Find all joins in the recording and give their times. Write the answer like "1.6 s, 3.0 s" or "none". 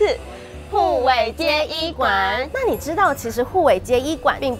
2.5 s